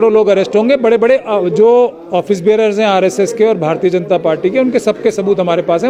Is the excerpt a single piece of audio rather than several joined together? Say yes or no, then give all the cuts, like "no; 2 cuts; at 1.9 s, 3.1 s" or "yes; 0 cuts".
yes; 0 cuts